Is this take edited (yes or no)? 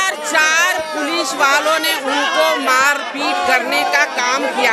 no